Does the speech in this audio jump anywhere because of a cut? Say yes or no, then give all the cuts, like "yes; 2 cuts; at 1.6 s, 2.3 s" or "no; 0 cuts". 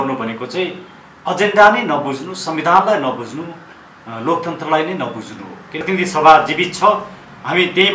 yes; 1 cut; at 5.8 s